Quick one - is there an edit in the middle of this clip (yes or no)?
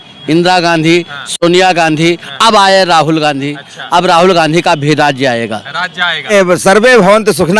yes